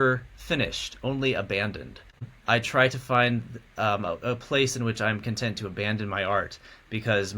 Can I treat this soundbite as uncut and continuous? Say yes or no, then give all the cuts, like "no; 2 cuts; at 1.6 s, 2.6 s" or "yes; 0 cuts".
no; 1 cut; at 2.3 s